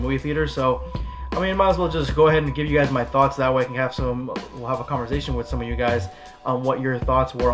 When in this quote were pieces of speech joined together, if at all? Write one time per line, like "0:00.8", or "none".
0:04.8